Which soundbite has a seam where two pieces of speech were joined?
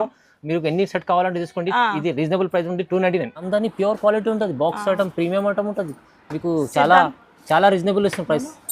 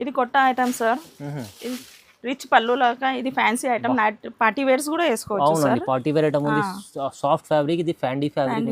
first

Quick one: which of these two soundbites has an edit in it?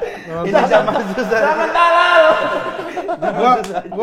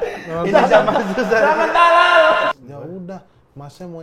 second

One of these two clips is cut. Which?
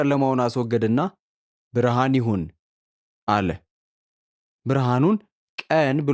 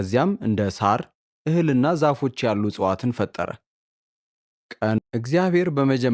second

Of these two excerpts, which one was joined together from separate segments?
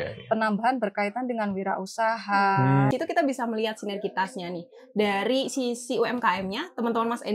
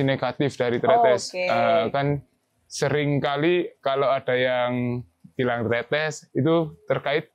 first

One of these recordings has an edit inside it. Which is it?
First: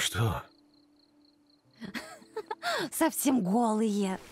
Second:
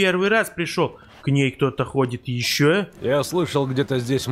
second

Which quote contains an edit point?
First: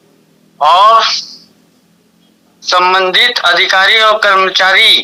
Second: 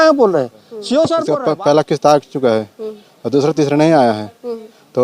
second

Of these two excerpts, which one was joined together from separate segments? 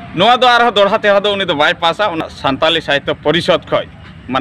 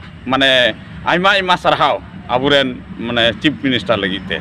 first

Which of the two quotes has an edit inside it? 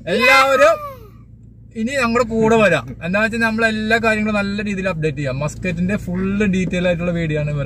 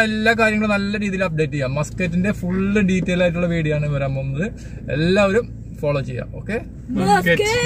second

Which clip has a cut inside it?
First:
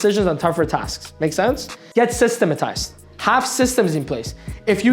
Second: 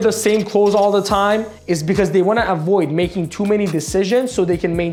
first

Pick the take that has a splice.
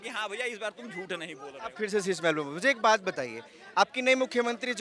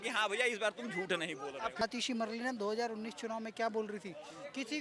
second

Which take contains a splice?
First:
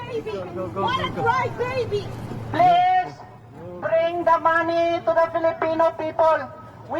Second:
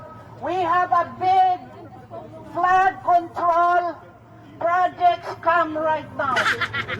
first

